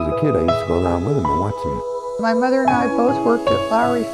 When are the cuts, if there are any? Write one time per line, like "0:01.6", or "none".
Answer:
none